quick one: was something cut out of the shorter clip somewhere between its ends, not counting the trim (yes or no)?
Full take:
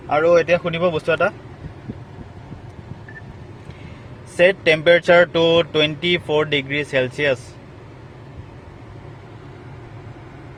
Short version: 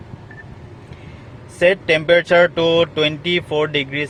no